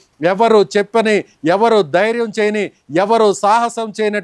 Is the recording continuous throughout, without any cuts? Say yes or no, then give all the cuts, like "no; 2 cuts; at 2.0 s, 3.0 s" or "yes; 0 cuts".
yes; 0 cuts